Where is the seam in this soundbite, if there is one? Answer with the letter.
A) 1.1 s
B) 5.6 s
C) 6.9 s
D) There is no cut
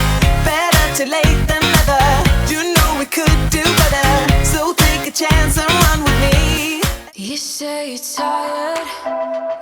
C